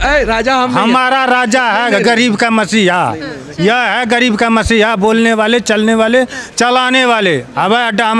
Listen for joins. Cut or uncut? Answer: uncut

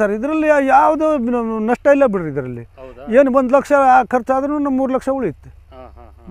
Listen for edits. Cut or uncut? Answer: uncut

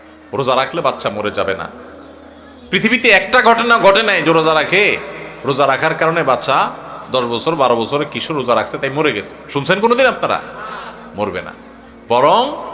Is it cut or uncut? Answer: uncut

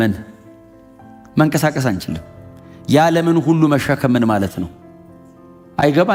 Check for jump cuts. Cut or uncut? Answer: uncut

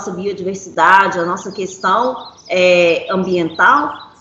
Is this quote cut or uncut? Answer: uncut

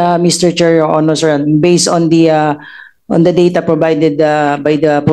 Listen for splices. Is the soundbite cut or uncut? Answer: uncut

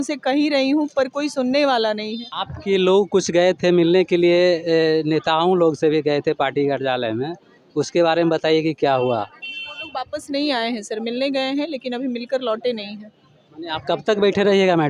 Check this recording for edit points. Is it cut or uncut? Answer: uncut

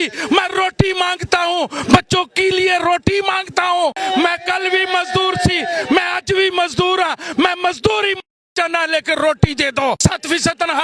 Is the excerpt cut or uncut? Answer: cut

